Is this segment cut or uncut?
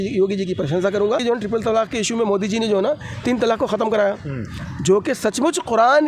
cut